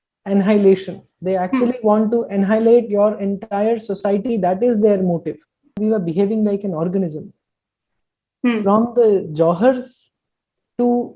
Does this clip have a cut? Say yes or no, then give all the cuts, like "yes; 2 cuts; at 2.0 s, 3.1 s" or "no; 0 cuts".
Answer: yes; 1 cut; at 5.8 s